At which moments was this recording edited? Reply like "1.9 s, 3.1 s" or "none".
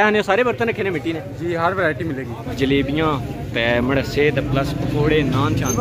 2.5 s